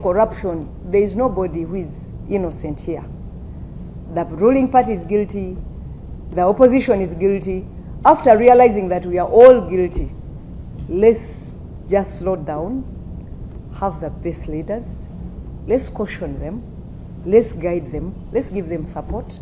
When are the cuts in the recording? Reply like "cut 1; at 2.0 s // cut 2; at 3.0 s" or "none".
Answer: none